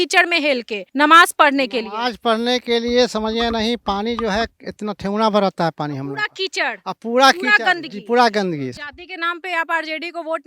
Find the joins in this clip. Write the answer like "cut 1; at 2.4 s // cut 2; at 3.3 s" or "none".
cut 1; at 8.8 s